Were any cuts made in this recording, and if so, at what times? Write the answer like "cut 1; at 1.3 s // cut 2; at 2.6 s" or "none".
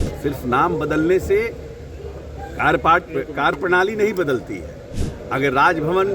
none